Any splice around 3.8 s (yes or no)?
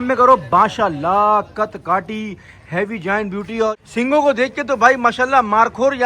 yes